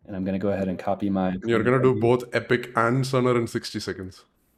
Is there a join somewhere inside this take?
no; 0 cuts

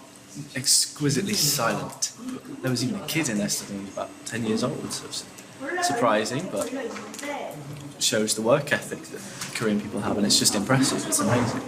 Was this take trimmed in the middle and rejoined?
no; 0 cuts

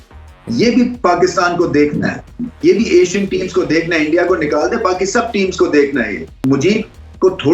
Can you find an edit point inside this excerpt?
yes; 1 cut; at 6.4 s

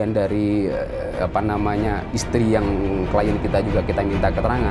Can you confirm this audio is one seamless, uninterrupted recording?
yes; 0 cuts

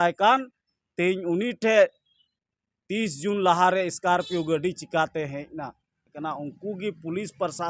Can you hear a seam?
yes; 1 cut; at 6.1 s

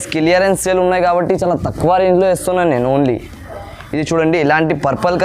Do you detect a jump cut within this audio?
no; 0 cuts

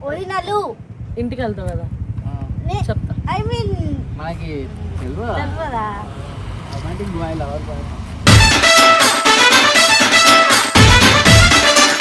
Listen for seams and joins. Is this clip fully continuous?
yes; 0 cuts

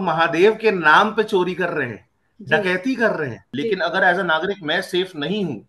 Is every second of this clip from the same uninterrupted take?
no; 1 cut; at 3.4 s

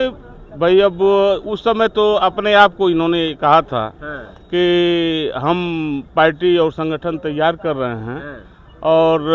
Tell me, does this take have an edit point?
no; 0 cuts

